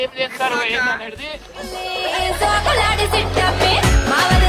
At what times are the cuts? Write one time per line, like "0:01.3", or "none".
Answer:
none